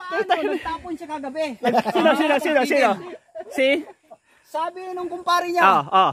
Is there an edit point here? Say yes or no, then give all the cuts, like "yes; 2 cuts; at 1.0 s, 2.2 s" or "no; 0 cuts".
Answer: no; 0 cuts